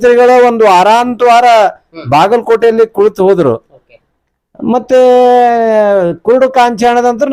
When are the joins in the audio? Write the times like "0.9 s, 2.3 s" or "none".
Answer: none